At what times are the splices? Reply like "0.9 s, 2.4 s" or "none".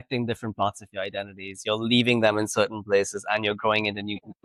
none

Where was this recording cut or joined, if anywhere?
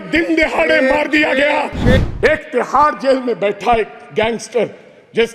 2.0 s

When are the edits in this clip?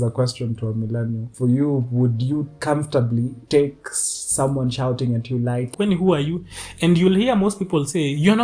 1.3 s, 2.5 s, 3.4 s, 5.7 s

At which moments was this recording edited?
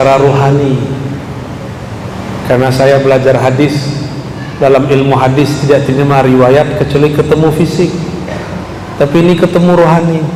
none

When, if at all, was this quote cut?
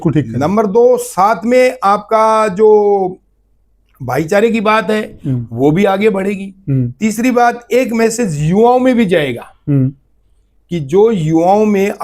none

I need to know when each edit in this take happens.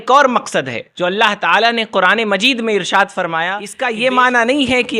3.7 s

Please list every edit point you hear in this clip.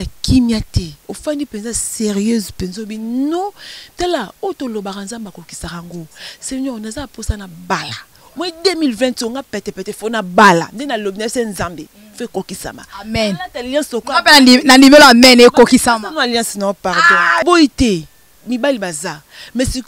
17.4 s

